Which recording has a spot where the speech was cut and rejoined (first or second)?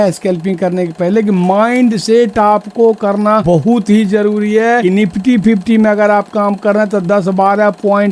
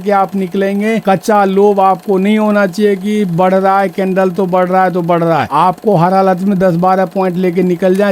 first